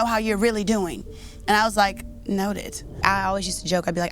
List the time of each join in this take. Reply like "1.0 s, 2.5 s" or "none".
3.0 s